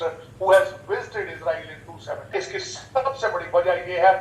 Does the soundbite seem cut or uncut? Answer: cut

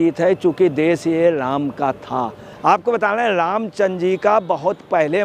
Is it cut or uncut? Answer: cut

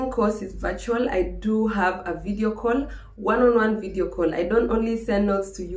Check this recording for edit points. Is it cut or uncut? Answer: uncut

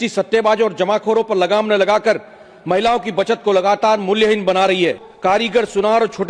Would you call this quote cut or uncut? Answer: cut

